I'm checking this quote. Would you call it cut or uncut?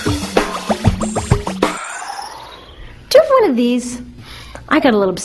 uncut